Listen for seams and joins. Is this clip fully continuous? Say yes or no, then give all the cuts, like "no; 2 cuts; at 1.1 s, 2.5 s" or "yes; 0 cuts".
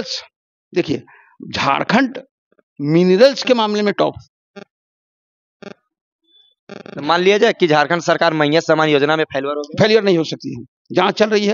yes; 0 cuts